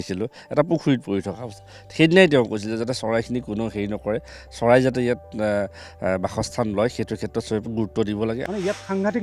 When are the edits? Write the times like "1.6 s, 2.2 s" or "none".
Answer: 7.6 s, 8.4 s